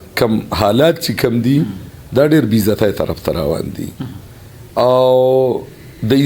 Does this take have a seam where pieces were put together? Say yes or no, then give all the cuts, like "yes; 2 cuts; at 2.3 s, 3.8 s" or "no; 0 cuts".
no; 0 cuts